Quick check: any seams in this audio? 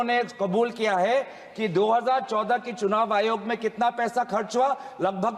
no; 0 cuts

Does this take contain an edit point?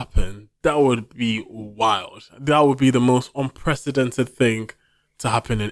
no; 0 cuts

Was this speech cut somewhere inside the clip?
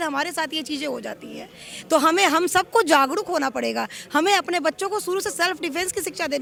no; 0 cuts

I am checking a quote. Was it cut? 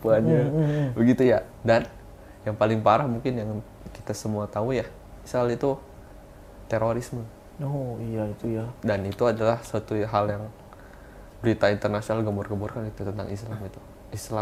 no; 0 cuts

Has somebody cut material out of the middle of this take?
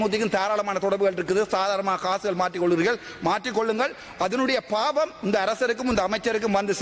no; 0 cuts

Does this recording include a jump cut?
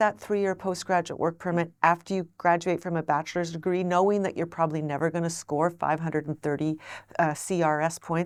no; 0 cuts

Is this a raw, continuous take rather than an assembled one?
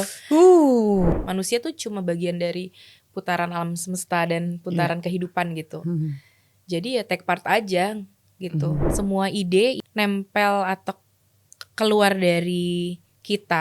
no; 2 cuts; at 1.1 s, 8.8 s

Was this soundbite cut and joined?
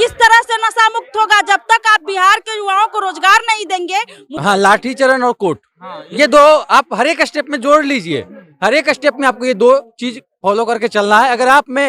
yes; 1 cut; at 4.3 s

